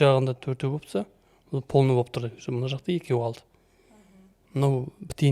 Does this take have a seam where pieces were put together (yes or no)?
no